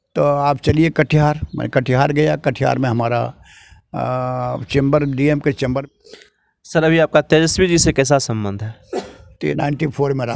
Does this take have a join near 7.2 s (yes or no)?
no